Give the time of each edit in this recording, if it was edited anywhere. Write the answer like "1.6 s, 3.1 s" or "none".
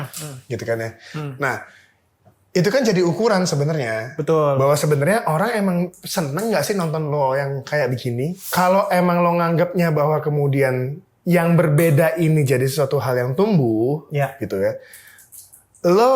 8.5 s

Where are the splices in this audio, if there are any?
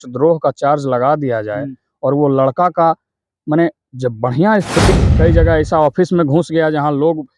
4.9 s

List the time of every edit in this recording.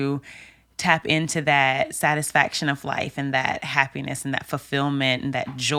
none

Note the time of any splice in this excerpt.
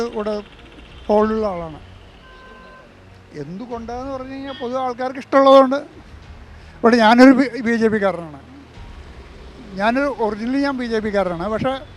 none

